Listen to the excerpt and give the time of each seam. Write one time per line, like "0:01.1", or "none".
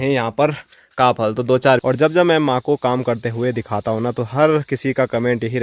0:01.8